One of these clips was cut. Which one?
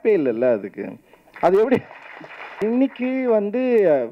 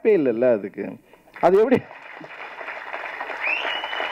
first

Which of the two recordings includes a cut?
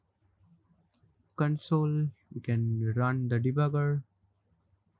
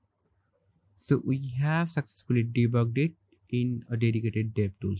first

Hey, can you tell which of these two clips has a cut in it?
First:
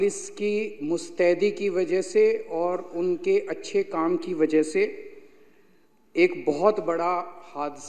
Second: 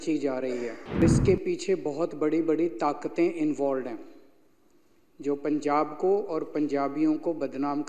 second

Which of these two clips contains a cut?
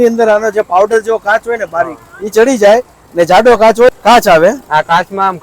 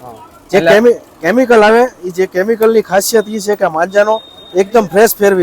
first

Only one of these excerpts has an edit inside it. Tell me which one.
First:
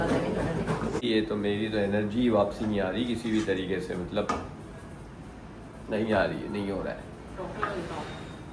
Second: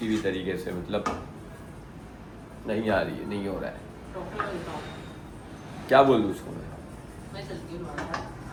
first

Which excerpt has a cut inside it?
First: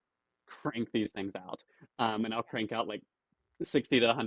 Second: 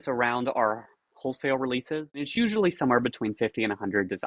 second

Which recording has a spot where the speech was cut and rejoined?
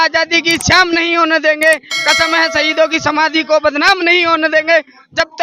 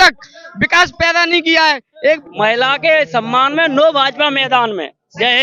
second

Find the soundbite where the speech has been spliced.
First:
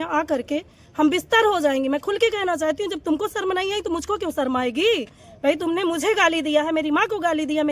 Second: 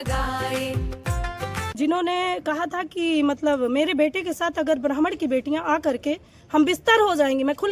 second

